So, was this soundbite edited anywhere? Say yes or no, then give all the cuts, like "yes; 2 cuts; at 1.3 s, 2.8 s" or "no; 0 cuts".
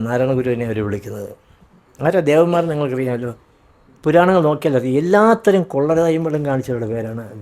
no; 0 cuts